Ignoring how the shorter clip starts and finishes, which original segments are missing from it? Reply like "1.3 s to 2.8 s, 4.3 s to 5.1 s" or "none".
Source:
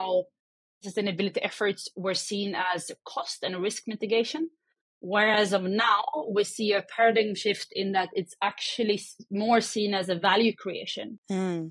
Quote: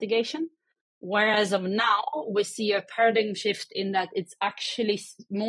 none

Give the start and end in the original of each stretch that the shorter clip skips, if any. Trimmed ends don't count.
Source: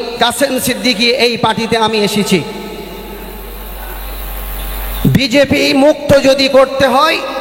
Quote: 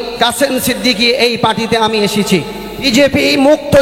2.8 s to 5.2 s

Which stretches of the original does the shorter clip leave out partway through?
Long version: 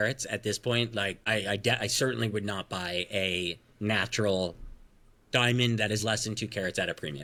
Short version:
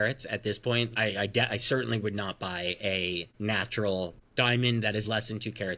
0.9 s to 1.2 s, 3.6 s to 3.7 s, 4.6 s to 5.2 s

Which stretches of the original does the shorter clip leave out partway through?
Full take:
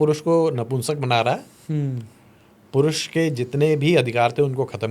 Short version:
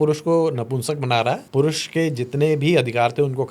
1.4 s to 2.6 s

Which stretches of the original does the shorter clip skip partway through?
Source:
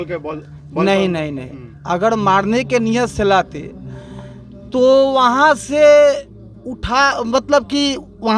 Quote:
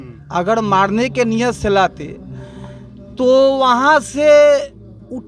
none

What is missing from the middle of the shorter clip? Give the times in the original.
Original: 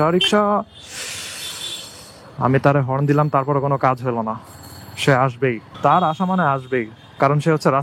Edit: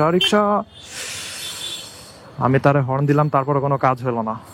none

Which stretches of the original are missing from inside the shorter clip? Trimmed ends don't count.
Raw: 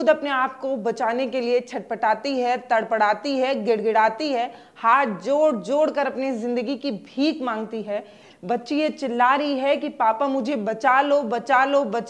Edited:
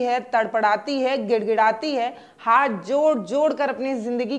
none

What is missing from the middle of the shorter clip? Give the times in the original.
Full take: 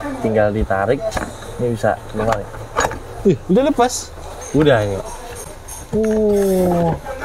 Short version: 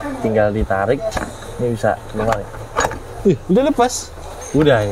none

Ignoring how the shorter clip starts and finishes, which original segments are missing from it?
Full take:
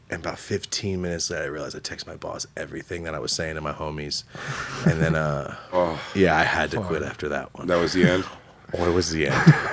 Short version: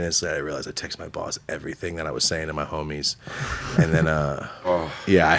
none

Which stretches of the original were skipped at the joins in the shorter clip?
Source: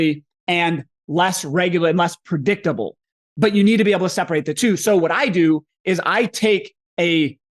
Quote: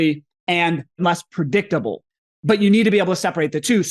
1.0 s to 1.9 s

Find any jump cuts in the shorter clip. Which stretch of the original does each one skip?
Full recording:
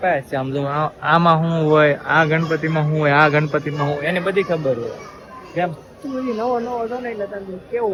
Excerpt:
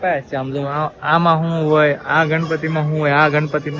none

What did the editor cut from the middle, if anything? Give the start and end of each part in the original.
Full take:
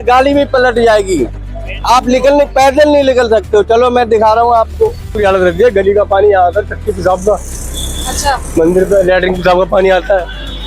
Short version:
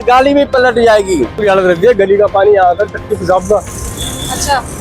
1.3 s to 5.1 s

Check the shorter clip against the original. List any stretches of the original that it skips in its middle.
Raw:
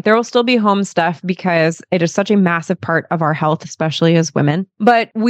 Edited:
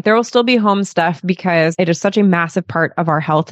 1.7 s to 1.9 s

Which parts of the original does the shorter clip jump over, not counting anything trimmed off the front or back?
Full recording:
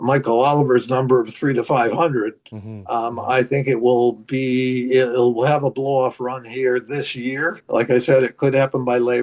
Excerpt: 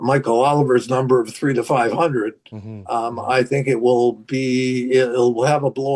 none

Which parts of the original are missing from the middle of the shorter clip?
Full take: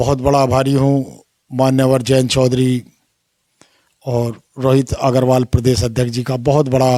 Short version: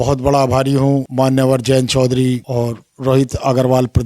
1.1 s to 1.5 s, 2.9 s to 4.0 s

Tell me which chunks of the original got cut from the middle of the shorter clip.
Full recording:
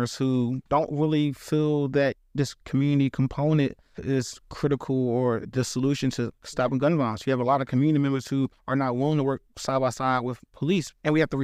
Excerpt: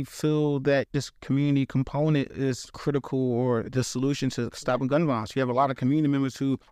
2.2 s to 2.4 s, 4.0 s to 4.3 s, 5.8 s to 5.9 s

